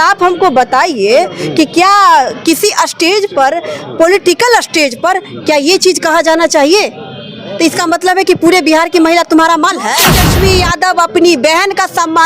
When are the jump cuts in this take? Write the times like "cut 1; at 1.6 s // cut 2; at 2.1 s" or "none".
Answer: cut 1; at 10.2 s